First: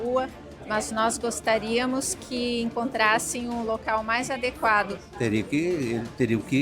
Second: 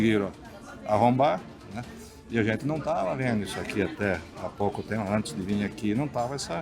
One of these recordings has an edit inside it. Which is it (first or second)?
first